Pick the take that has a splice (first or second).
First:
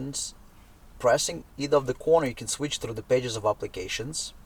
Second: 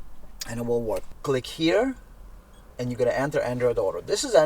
second